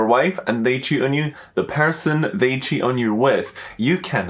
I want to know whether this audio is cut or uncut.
uncut